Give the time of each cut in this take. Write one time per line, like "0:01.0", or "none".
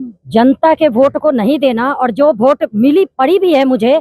none